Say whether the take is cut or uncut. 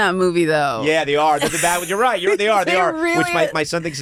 uncut